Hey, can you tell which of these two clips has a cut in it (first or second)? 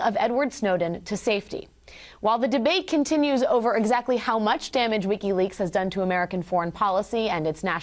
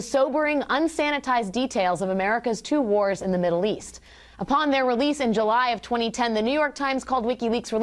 first